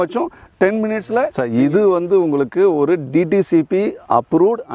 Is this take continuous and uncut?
no; 1 cut; at 1.3 s

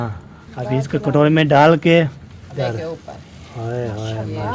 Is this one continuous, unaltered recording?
no; 1 cut; at 2.5 s

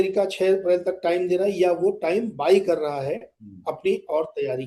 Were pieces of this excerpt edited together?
no; 0 cuts

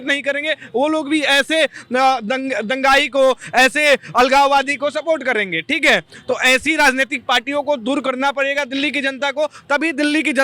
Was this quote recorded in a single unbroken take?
yes; 0 cuts

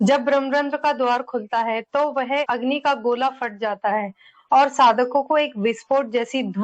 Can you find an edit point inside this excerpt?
no; 0 cuts

